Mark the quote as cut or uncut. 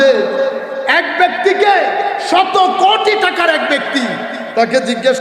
uncut